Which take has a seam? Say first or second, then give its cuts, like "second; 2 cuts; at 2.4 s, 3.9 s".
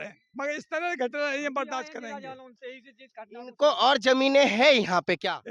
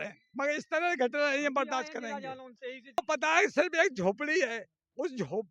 second; 1 cut; at 3.0 s